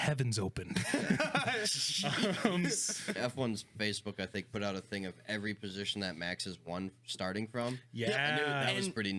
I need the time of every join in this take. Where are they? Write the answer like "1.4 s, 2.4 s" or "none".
3.2 s

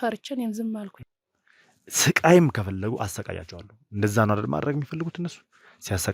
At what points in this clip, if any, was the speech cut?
1.0 s

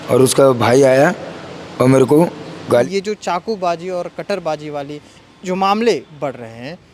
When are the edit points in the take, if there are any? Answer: 2.8 s

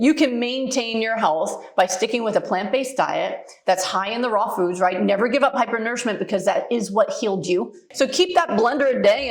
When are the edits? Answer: 7.8 s

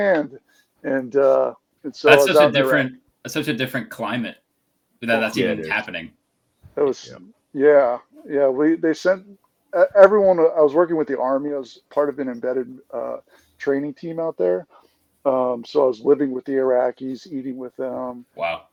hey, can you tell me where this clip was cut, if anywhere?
none

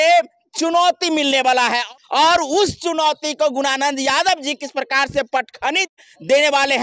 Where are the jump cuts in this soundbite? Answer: 1.8 s, 5.9 s

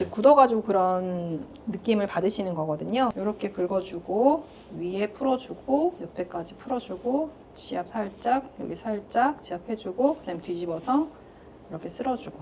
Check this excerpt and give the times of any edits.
3.2 s, 6.0 s

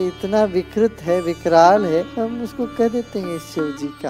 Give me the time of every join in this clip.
2.1 s

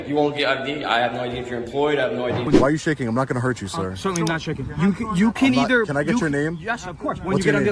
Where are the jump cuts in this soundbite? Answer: 2.4 s

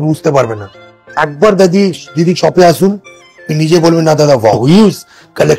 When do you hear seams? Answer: 4.6 s

